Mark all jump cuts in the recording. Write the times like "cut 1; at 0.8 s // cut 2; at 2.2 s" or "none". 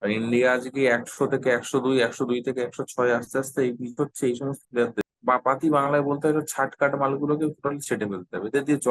cut 1; at 5.0 s